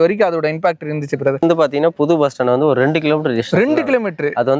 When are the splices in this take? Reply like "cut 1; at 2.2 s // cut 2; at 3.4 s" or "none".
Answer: cut 1; at 1.4 s